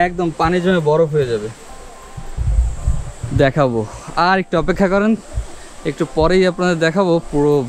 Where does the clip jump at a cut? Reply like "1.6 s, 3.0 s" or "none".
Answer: 1.6 s